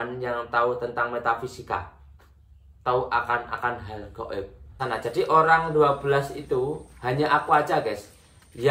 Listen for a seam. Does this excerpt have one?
yes; 1 cut; at 4.7 s

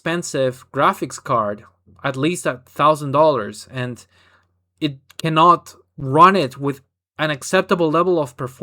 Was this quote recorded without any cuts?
yes; 0 cuts

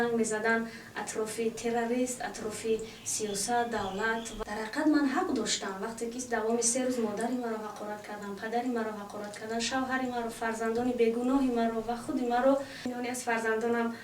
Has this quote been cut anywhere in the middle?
yes; 2 cuts; at 4.3 s, 12.8 s

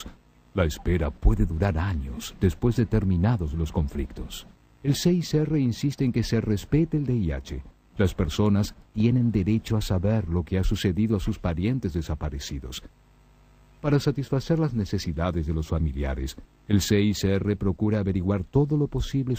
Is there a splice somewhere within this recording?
yes; 1 cut; at 9.7 s

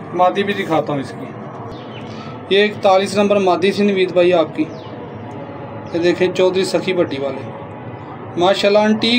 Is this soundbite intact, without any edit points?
yes; 0 cuts

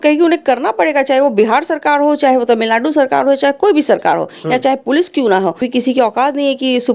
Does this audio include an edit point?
yes; 1 cut; at 5.7 s

